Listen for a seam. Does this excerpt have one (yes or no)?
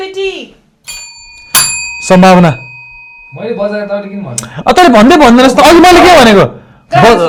no